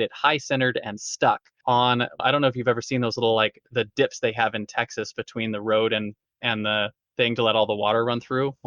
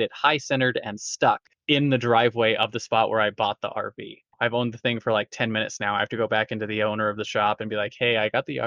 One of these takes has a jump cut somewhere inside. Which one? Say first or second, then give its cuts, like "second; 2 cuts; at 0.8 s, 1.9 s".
second; 2 cuts; at 1.5 s, 4.2 s